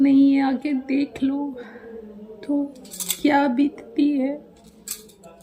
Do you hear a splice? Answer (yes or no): no